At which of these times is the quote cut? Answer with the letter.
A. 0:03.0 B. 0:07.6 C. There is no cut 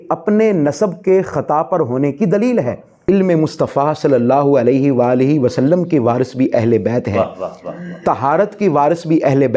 A